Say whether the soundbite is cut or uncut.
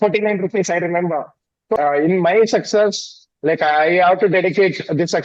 cut